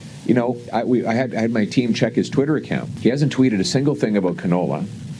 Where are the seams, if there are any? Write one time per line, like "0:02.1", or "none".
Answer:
0:02.9